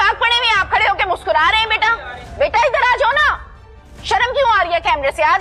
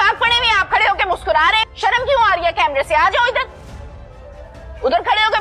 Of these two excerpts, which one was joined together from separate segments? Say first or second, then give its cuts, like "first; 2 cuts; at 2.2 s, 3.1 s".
second; 1 cut; at 1.7 s